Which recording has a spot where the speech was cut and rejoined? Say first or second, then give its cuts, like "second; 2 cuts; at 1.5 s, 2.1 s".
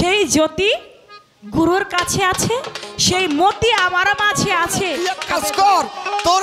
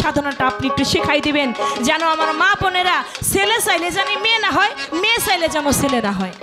first; 1 cut; at 5.1 s